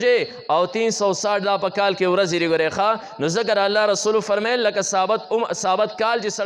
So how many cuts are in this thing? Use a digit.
0